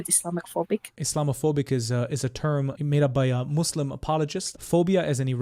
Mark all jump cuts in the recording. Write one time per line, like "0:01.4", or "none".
0:00.9
0:02.7
0:04.5